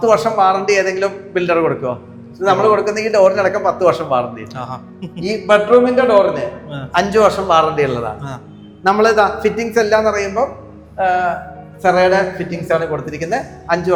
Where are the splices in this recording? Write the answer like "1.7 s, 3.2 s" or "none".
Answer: none